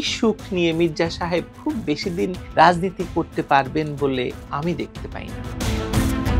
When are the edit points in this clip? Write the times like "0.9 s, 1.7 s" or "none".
5.5 s